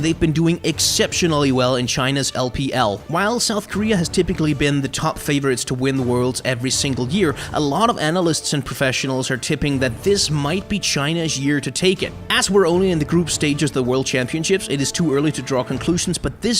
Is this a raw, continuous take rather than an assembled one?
no; 1 cut; at 14.2 s

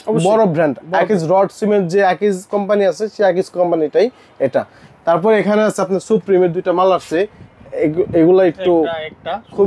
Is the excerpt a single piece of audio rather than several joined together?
yes; 0 cuts

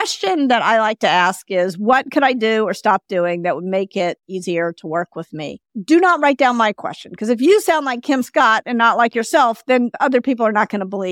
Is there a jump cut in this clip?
yes; 2 cuts; at 5.7 s, 9.9 s

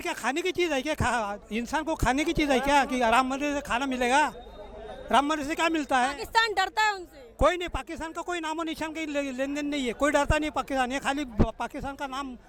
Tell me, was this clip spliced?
no; 0 cuts

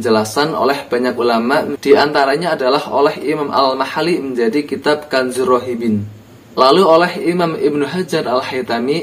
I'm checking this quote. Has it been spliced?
yes; 1 cut; at 1.7 s

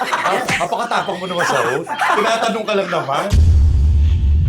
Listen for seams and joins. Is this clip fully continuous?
no; 1 cut; at 3.3 s

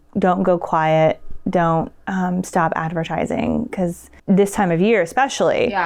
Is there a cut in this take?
no; 0 cuts

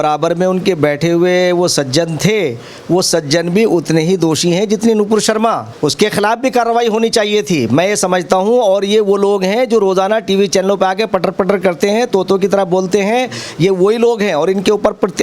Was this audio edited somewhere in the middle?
yes; 1 cut; at 5.7 s

